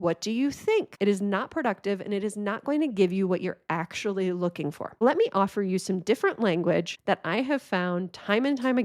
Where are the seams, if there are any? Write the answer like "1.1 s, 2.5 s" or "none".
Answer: 0.9 s, 5.0 s, 6.9 s